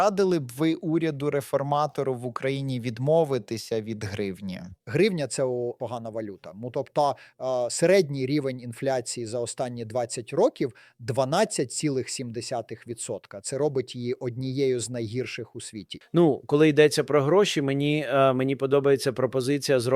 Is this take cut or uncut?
uncut